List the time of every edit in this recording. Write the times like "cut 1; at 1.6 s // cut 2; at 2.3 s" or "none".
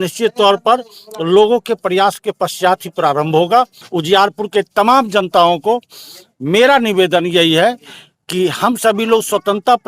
cut 1; at 3.8 s